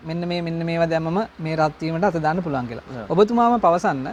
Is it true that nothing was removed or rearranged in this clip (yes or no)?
yes